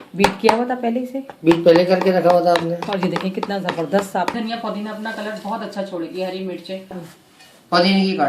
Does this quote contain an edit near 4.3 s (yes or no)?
yes